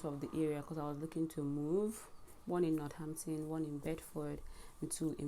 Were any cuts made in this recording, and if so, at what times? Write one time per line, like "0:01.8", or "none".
none